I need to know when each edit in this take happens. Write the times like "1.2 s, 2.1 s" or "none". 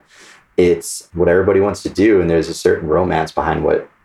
1.0 s

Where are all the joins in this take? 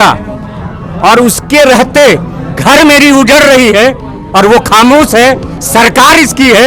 none

